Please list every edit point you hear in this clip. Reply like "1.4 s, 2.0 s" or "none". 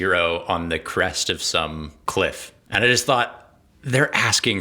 1.9 s, 2.5 s